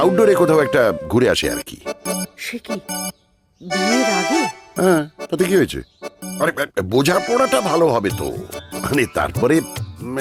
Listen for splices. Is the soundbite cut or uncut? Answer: uncut